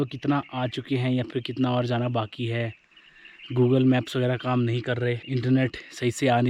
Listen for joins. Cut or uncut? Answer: cut